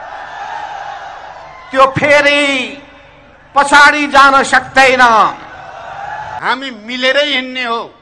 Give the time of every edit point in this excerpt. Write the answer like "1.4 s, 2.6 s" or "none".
6.3 s

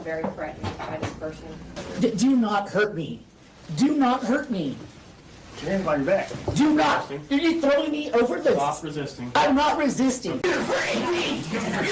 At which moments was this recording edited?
none

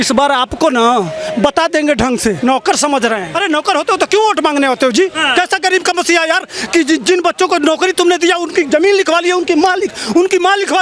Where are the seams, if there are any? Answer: 2.4 s, 3.3 s, 5.2 s

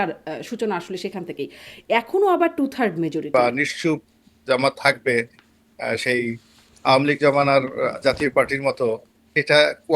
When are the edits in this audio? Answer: 3.3 s

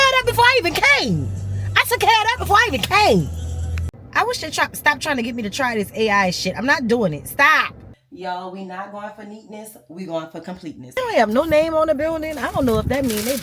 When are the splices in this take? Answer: 4.0 s, 7.8 s, 11.0 s

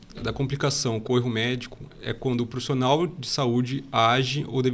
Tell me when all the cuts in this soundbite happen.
none

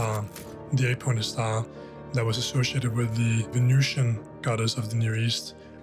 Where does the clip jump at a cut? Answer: 3.5 s

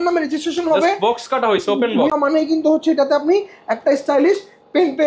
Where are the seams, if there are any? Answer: 2.1 s

